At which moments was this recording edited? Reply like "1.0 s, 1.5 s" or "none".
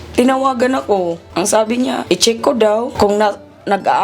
1.2 s, 2.0 s, 2.9 s